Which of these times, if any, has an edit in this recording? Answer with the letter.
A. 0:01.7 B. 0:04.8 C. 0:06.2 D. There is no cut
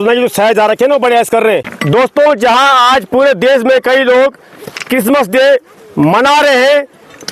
A